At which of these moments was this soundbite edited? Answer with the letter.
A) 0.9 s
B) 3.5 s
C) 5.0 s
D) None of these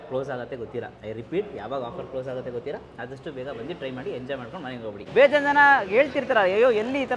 C